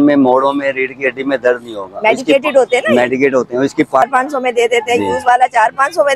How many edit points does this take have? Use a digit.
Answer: 1